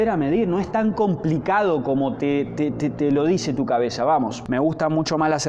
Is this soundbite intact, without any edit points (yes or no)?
no